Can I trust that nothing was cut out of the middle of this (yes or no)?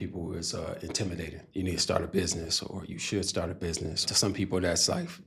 no